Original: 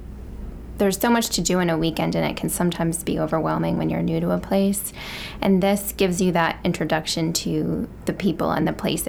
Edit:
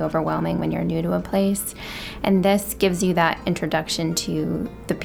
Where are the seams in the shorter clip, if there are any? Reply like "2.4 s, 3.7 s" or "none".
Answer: none